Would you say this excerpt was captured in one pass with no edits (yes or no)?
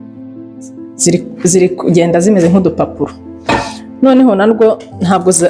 no